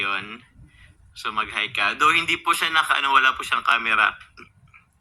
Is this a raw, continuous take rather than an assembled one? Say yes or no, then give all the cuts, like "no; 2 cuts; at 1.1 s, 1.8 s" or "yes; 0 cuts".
yes; 0 cuts